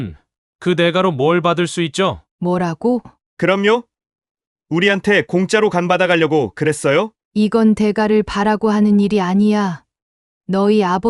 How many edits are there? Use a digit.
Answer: 3